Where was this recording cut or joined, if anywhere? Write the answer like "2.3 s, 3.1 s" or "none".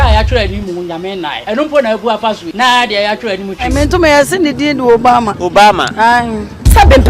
3.7 s